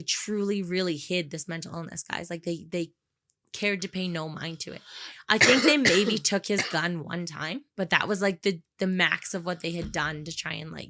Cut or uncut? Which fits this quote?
cut